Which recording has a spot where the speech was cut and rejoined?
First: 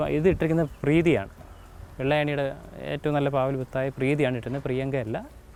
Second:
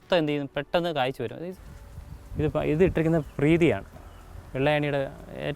second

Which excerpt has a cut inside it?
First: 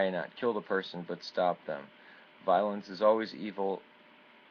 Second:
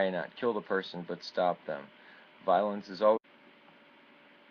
first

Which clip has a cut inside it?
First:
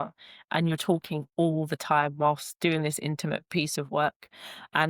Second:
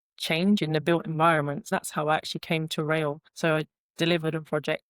second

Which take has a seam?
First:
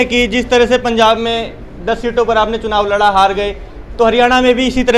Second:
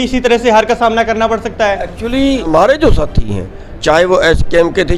second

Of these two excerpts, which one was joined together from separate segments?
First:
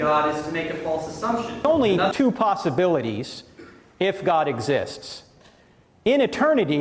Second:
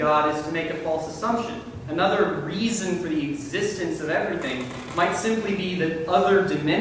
first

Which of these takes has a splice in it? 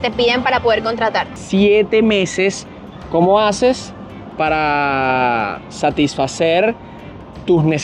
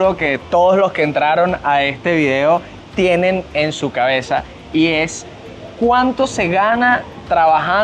first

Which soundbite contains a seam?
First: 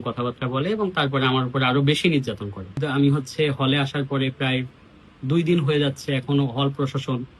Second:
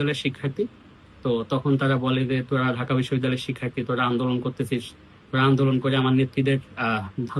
first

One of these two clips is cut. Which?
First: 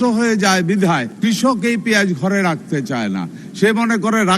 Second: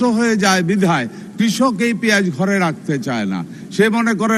first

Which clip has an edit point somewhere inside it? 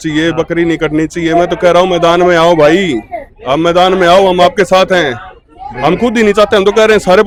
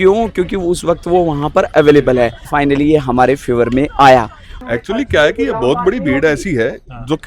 second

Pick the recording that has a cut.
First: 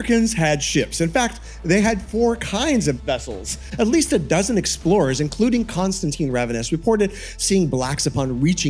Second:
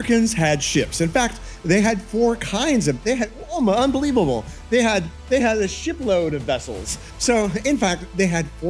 first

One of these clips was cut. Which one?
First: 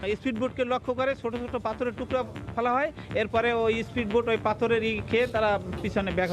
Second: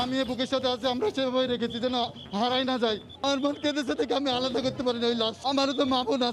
second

